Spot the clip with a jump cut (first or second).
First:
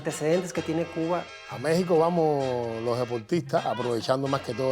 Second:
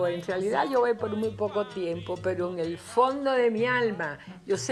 first